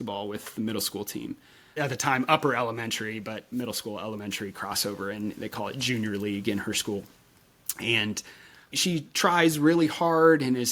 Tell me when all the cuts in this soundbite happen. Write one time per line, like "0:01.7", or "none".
none